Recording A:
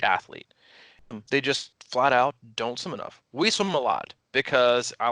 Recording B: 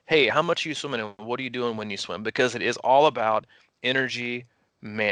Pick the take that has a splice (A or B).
A